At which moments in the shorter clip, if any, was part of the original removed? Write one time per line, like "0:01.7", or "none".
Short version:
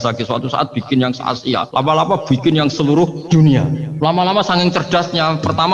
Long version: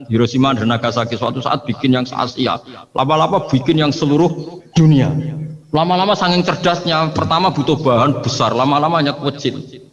0:01.7
0:03.2
0:03.8